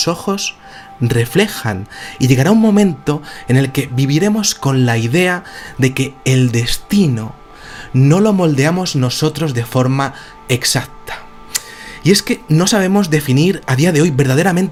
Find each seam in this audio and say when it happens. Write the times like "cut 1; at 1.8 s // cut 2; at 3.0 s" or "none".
none